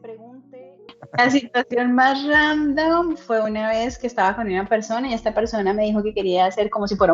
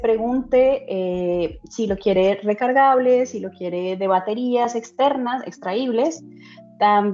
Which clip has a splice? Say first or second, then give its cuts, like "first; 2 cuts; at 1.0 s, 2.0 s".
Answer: first; 1 cut; at 1.0 s